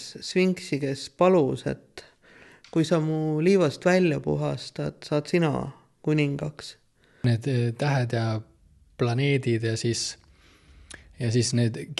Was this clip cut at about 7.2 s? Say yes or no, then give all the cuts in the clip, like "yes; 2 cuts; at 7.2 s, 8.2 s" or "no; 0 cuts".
yes; 1 cut; at 7.2 s